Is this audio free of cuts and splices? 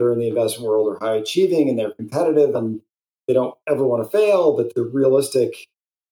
no; 2 cuts; at 2.6 s, 4.7 s

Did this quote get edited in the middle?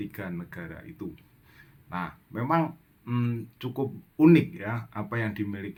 no; 0 cuts

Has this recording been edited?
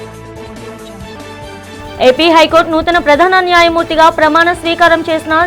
yes; 1 cut; at 1.1 s

